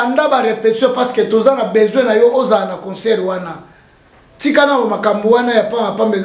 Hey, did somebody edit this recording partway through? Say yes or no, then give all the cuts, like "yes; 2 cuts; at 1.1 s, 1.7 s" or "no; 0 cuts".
no; 0 cuts